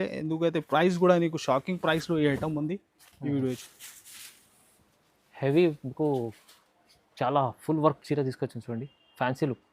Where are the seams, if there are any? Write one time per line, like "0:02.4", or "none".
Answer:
0:03.6